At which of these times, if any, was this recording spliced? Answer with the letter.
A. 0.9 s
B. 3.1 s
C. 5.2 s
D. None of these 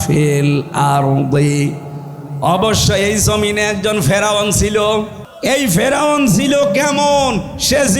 C